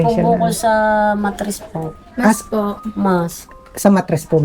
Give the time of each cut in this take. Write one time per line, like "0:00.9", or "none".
none